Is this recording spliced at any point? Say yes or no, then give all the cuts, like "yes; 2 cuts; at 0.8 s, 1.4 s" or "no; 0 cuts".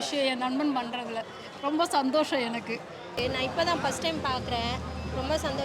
yes; 1 cut; at 3.1 s